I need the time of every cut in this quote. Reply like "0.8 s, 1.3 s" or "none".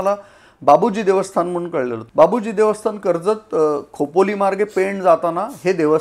none